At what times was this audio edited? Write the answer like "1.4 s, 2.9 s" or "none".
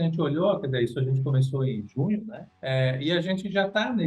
2.5 s